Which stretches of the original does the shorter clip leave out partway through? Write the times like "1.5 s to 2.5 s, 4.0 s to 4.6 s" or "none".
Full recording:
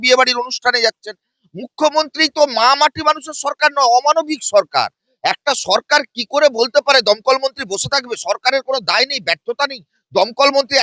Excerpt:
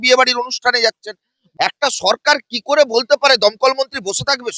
1.4 s to 5.0 s